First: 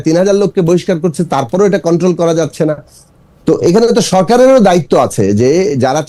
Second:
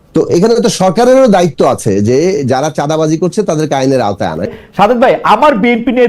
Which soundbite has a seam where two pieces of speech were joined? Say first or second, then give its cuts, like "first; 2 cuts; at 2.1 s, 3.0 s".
second; 1 cut; at 4.5 s